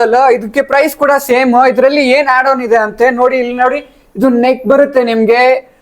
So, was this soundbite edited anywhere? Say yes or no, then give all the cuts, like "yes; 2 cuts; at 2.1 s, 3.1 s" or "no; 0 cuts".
no; 0 cuts